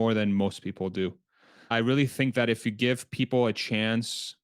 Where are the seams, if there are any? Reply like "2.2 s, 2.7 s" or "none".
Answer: 1.7 s